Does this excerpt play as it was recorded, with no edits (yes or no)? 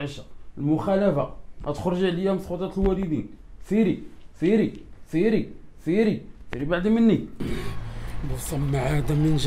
no